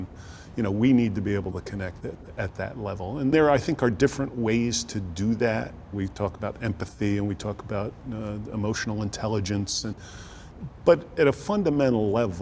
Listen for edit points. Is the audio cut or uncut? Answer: cut